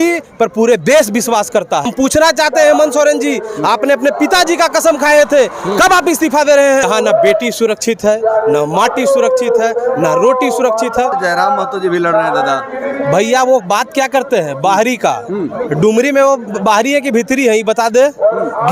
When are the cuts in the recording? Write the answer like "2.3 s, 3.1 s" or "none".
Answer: 1.9 s, 6.8 s, 11.1 s